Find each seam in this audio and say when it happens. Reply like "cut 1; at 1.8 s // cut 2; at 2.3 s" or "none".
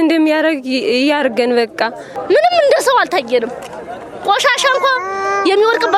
cut 1; at 2.2 s

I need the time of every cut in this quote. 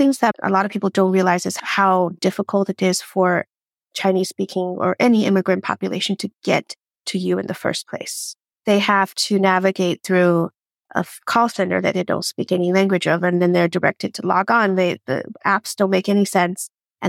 cut 1; at 1.6 s

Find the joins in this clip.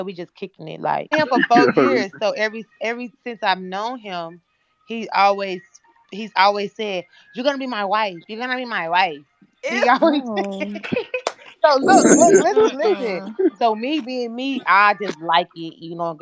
cut 1; at 1.1 s

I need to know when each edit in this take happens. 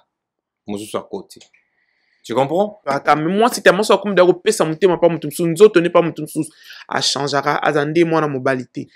cut 1; at 2.9 s

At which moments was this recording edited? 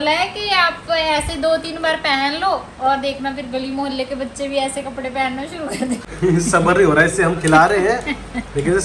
cut 1; at 6.0 s

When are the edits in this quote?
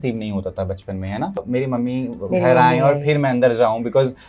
cut 1; at 1.4 s

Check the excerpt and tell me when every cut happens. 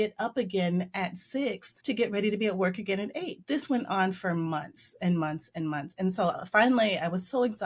cut 1; at 1.7 s // cut 2; at 3.3 s

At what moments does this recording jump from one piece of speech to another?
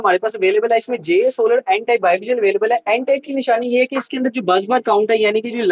none

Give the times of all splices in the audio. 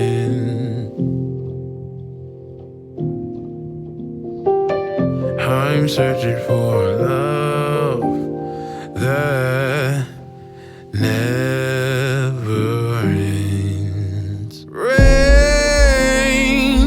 none

